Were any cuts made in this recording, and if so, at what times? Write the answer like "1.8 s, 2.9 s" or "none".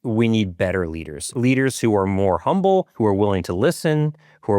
1.3 s, 2.9 s